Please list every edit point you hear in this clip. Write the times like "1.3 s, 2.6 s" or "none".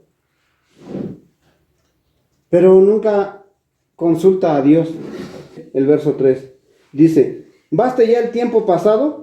5.6 s